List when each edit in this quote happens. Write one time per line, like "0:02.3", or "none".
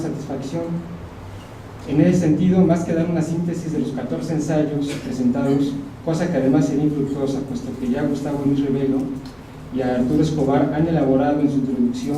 0:09.5